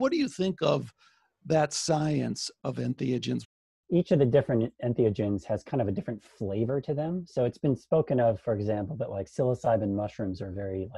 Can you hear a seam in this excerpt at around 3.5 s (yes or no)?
yes